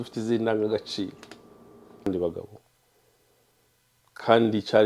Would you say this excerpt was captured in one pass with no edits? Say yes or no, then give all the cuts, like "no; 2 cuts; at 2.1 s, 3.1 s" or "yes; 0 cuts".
no; 1 cut; at 2.1 s